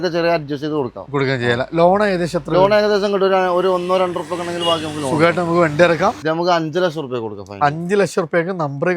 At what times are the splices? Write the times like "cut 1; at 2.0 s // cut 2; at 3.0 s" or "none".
cut 1; at 6.2 s

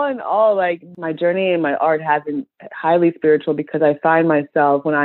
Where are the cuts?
none

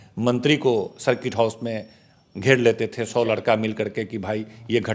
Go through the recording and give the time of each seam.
none

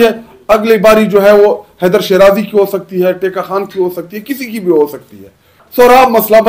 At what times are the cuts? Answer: cut 1; at 5.6 s

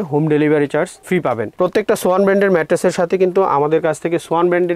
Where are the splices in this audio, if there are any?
cut 1; at 1.5 s

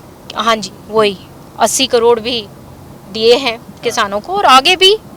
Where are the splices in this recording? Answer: none

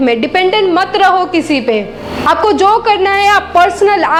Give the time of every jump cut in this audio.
none

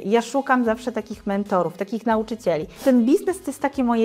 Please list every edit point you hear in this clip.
cut 1; at 2.8 s

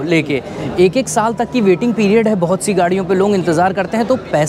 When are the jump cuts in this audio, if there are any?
none

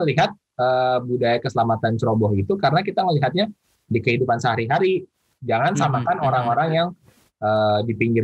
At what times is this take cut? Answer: cut 1; at 5.2 s

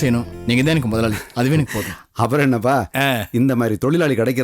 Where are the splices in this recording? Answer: none

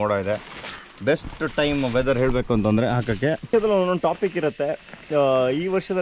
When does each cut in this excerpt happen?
cut 1; at 3.5 s

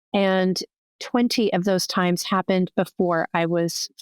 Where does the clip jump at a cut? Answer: cut 1; at 1.0 s

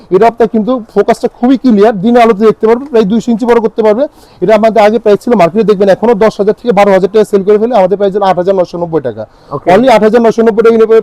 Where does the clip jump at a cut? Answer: none

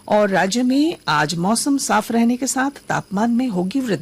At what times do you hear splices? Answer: none

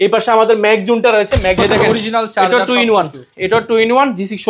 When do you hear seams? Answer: cut 1; at 1.6 s

